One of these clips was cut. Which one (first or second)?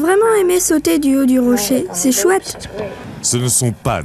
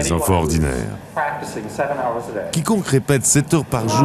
first